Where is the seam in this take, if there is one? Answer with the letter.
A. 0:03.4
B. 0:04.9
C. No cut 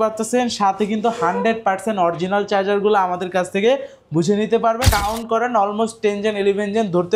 B